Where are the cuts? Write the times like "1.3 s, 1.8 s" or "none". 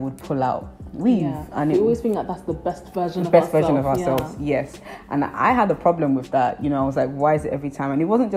none